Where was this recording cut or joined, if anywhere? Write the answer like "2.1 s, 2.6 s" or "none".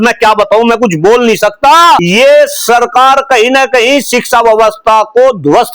2.0 s